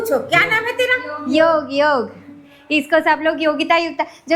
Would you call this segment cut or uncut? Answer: uncut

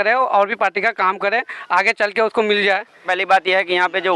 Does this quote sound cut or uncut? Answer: cut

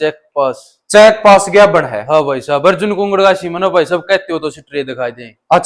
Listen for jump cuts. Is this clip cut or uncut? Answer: uncut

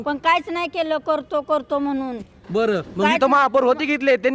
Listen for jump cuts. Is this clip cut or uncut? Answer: uncut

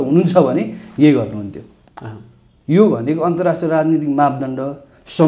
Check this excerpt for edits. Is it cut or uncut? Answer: uncut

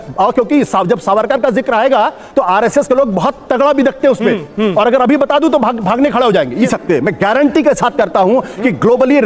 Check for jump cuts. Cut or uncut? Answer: cut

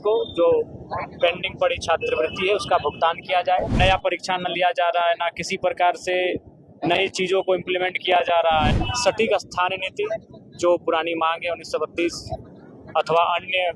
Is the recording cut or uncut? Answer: cut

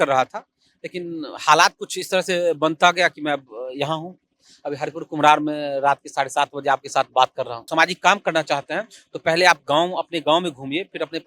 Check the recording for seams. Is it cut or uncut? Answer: cut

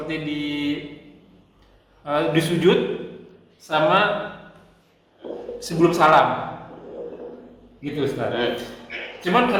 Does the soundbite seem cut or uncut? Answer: uncut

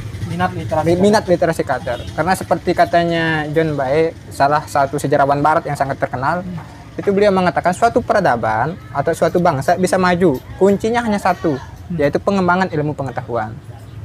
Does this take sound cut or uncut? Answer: uncut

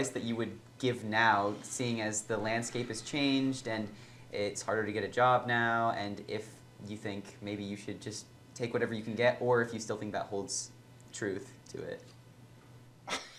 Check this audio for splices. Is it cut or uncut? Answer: uncut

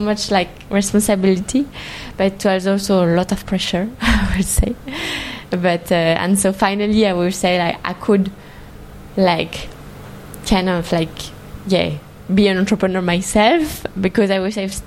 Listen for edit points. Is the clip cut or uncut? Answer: cut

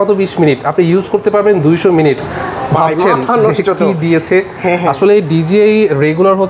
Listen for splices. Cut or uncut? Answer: uncut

